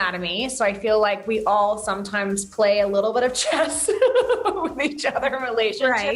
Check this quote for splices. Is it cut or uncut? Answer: uncut